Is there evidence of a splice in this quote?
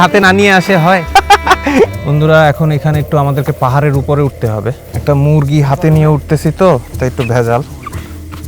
yes; 2 cuts; at 1.9 s, 4.9 s

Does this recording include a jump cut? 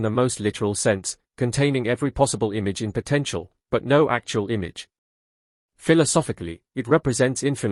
no; 0 cuts

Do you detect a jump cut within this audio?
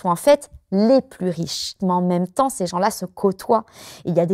yes; 1 cut; at 1.8 s

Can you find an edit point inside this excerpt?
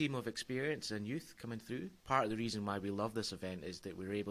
yes; 1 cut; at 1.9 s

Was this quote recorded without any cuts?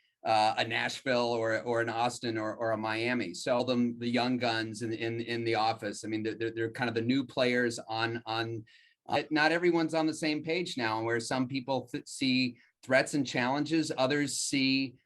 no; 2 cuts; at 3.6 s, 9.2 s

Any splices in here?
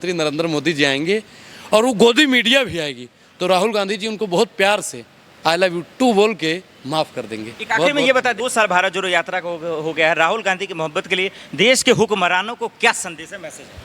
yes; 1 cut; at 8.4 s

